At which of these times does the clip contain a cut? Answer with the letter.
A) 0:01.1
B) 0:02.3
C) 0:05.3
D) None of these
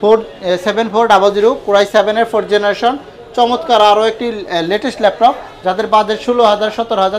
D